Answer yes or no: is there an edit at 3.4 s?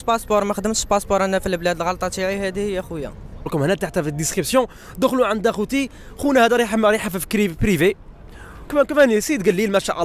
yes